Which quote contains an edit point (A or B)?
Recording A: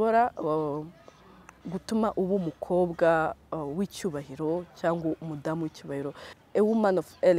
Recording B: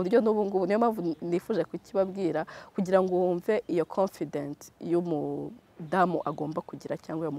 A